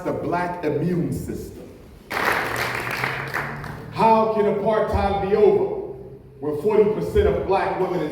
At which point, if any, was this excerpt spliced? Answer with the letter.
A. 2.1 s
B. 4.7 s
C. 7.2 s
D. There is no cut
A